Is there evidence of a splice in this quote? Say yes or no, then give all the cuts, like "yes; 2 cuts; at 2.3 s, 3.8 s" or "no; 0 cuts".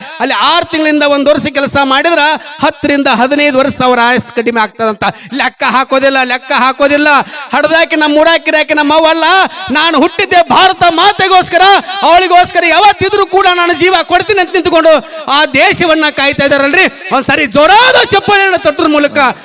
no; 0 cuts